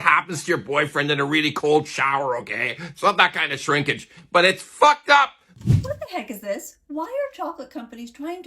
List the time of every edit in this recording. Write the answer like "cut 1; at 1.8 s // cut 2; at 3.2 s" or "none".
cut 1; at 5.4 s